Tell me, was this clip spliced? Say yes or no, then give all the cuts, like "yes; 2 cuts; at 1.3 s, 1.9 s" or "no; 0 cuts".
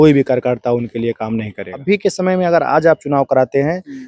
yes; 1 cut; at 1.7 s